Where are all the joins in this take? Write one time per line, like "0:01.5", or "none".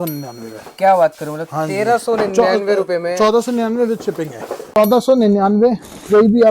0:04.8